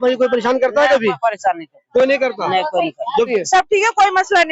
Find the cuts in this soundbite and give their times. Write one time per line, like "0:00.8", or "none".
0:03.3